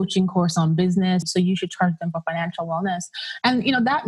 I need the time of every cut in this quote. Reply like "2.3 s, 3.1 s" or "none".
1.2 s